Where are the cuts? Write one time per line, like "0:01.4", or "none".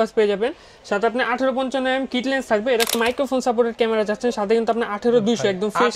0:02.9